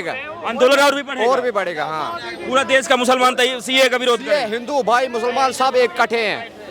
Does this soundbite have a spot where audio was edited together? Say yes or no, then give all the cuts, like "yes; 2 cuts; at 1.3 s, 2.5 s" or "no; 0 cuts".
no; 0 cuts